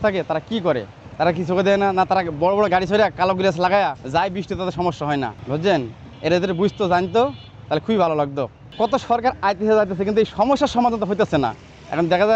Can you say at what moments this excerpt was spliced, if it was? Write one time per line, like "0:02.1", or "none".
0:01.0
0:04.0
0:05.4
0:08.6